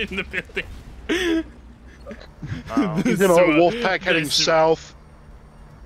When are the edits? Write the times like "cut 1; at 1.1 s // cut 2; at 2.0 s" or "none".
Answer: cut 1; at 2.2 s